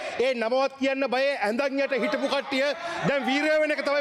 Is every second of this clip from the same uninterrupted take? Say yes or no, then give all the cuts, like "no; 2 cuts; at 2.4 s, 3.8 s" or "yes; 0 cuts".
yes; 0 cuts